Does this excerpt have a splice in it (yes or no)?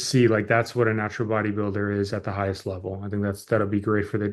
no